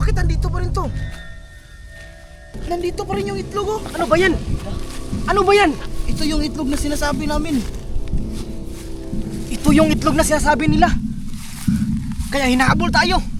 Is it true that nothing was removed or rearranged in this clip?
no; 1 cut; at 2.5 s

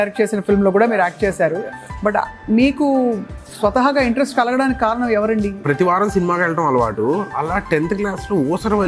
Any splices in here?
yes; 1 cut; at 5.6 s

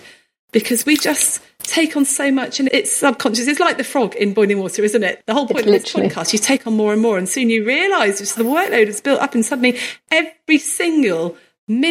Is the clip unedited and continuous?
no; 2 cuts; at 2.7 s, 5.2 s

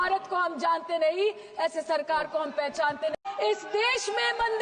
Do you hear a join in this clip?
yes; 1 cut; at 3.1 s

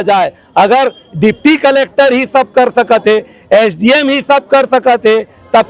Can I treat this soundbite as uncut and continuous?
yes; 0 cuts

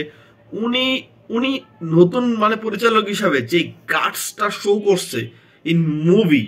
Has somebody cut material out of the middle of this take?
no; 0 cuts

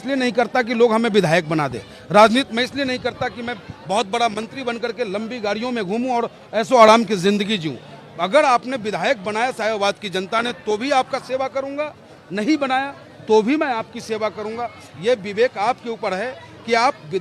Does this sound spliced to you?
no; 0 cuts

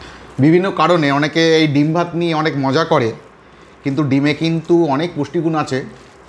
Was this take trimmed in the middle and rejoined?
no; 0 cuts

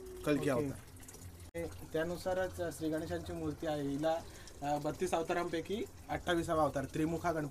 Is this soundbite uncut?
no; 1 cut; at 1.5 s

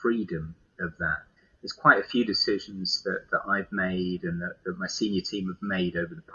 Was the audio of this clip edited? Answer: yes; 1 cut; at 1.4 s

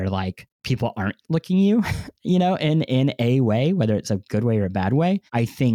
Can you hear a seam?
no; 0 cuts

